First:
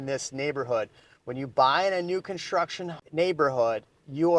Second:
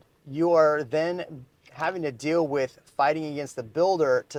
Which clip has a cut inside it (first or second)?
first